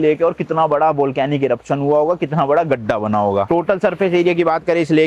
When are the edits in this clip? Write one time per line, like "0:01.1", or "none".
none